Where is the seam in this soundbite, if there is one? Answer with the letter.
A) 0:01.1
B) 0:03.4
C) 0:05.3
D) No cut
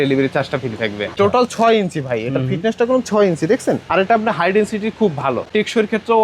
A